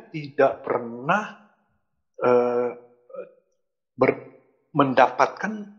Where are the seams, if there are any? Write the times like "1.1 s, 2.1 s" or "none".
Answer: none